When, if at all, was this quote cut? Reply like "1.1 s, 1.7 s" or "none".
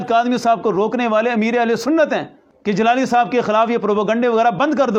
none